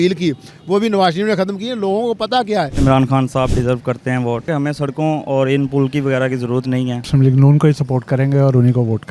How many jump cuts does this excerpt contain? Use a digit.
3